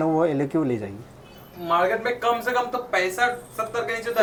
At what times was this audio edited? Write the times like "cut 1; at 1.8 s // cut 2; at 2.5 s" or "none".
none